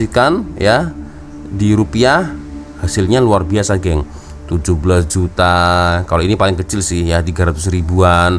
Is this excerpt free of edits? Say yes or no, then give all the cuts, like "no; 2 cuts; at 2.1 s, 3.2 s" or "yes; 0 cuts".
yes; 0 cuts